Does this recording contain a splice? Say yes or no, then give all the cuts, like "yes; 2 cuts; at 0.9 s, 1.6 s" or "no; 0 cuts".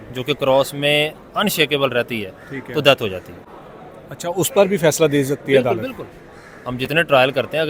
no; 0 cuts